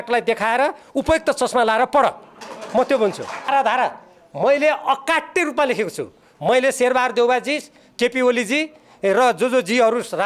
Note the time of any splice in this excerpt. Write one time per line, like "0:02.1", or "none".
0:03.5